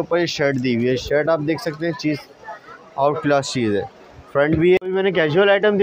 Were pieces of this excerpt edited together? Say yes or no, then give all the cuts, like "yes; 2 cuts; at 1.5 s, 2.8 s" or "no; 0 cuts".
yes; 1 cut; at 4.8 s